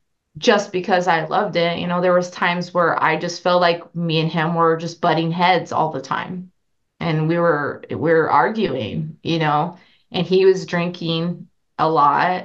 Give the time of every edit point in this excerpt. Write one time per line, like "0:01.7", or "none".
none